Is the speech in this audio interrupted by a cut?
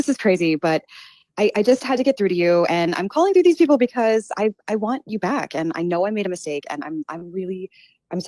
no; 0 cuts

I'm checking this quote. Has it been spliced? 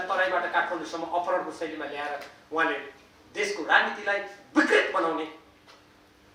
no; 0 cuts

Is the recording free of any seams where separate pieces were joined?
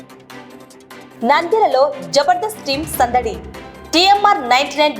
no; 1 cut; at 1.1 s

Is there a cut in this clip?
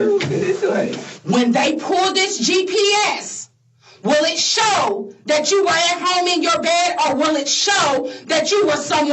yes; 1 cut; at 1.1 s

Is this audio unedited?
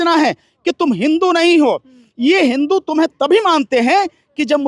yes; 0 cuts

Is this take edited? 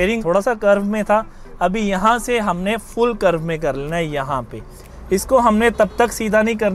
no; 0 cuts

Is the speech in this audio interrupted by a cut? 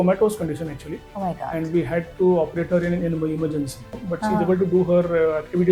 yes; 1 cut; at 3.9 s

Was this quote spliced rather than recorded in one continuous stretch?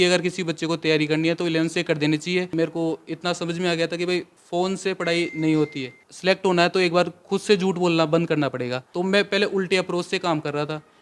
yes; 3 cuts; at 2.5 s, 6.0 s, 8.8 s

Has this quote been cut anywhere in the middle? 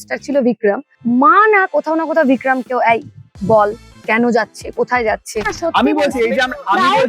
yes; 2 cuts; at 0.9 s, 5.5 s

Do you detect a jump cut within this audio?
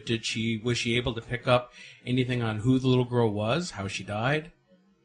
yes; 1 cut; at 1.2 s

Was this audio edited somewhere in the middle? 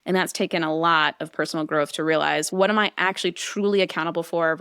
yes; 1 cut; at 2.5 s

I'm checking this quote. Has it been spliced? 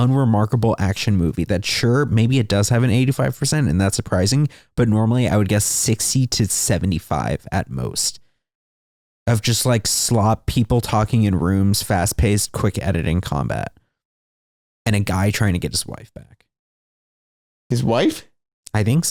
no; 0 cuts

